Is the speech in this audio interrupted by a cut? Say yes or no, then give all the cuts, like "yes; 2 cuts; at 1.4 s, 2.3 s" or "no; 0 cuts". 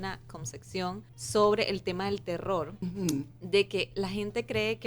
yes; 2 cuts; at 1.1 s, 2.8 s